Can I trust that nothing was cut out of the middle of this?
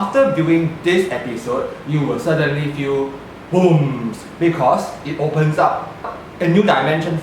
no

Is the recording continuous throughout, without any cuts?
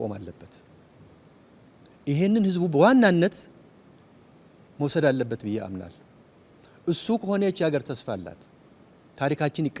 yes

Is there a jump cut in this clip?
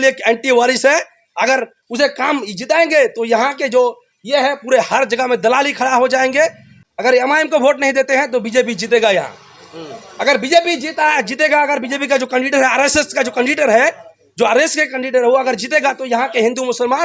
yes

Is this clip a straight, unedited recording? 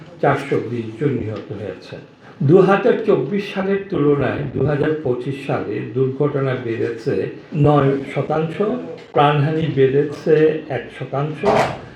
yes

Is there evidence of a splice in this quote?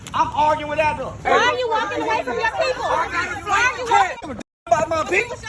yes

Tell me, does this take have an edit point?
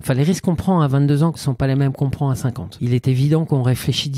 yes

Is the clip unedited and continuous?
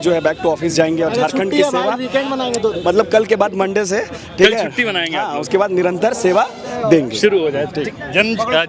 yes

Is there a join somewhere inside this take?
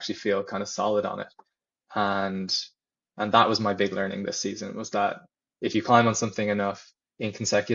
no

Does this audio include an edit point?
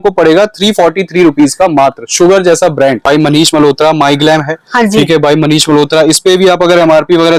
yes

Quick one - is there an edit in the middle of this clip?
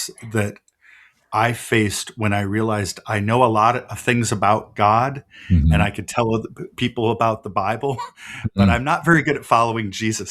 no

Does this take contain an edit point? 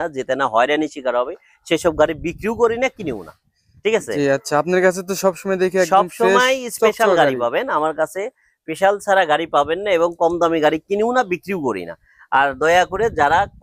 no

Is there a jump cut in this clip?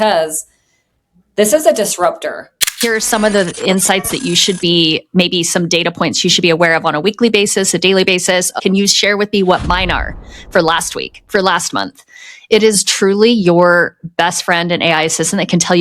yes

